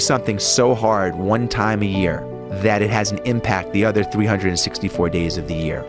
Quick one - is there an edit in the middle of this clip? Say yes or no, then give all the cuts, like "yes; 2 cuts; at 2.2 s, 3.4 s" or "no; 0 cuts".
no; 0 cuts